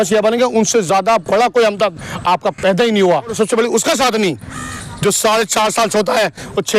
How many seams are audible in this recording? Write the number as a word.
one